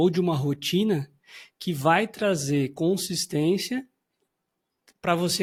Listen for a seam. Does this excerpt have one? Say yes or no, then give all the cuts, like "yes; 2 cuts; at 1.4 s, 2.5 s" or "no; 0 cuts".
no; 0 cuts